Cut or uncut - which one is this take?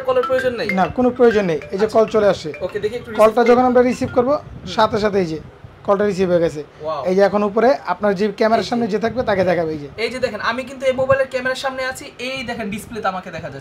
uncut